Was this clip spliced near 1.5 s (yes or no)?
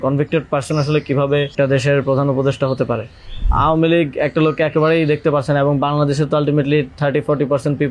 yes